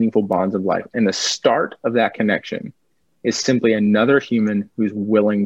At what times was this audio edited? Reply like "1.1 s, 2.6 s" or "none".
none